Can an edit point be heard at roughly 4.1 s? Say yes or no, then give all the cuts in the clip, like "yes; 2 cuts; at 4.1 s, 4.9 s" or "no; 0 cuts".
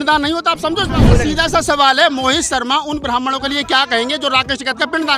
no; 1 cut; at 1.1 s